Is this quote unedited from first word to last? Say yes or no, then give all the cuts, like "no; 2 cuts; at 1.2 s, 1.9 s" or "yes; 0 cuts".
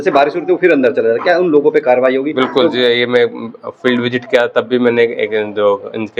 yes; 0 cuts